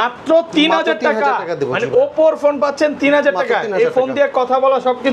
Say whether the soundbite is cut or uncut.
uncut